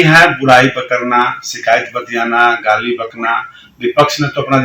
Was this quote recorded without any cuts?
yes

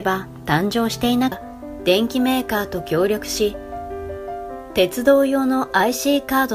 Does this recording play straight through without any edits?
yes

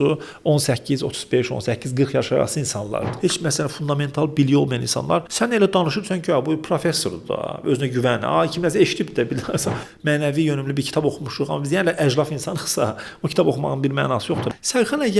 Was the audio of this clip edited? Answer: yes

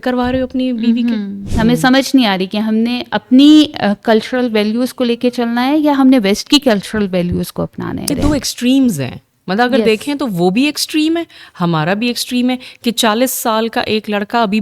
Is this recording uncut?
no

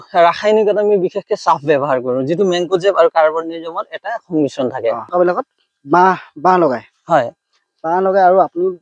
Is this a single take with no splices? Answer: no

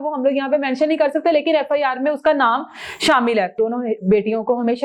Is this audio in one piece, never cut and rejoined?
no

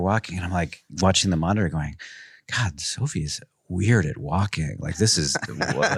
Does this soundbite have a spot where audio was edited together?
no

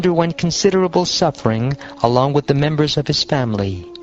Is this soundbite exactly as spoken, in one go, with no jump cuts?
no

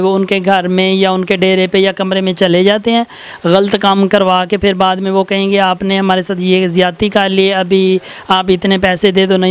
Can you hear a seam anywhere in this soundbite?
no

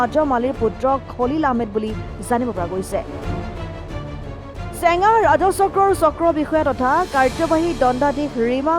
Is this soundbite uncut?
no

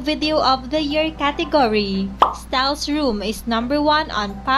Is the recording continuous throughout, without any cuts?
no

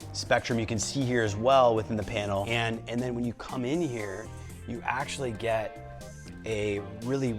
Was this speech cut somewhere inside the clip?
yes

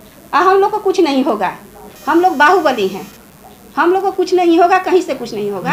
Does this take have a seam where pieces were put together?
no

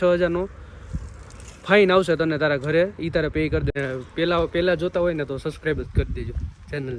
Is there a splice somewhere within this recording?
yes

